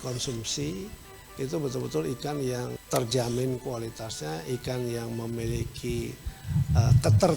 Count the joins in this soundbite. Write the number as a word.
one